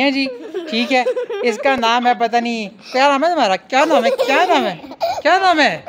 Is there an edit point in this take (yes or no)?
no